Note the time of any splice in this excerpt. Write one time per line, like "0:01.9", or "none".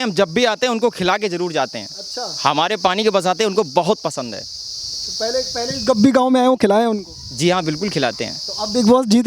none